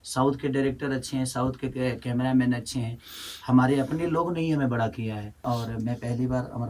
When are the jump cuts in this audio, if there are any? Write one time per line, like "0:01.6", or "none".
0:05.4